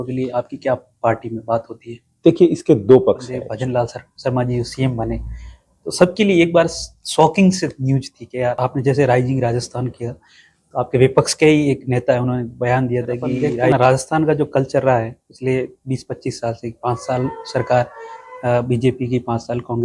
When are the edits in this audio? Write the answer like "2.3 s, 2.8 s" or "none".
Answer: 3.5 s, 8.6 s, 13.7 s

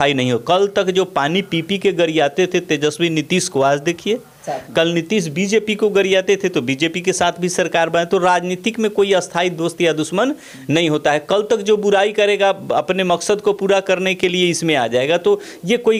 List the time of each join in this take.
none

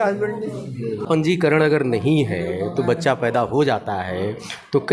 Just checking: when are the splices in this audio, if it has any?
1.0 s

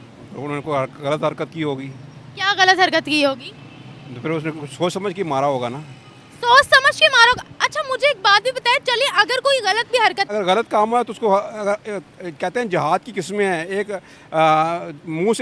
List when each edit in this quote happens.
10.3 s

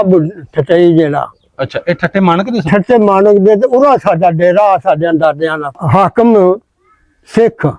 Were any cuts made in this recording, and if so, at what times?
5.8 s

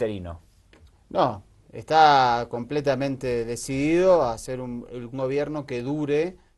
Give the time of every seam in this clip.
none

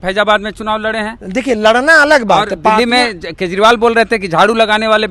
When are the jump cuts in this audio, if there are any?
none

